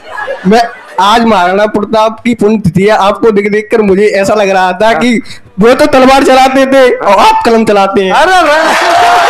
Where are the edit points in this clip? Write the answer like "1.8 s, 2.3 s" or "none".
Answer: none